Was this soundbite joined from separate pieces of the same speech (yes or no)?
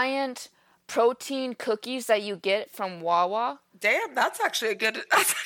yes